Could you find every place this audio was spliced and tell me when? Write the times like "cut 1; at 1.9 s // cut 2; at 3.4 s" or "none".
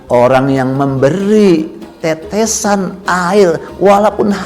none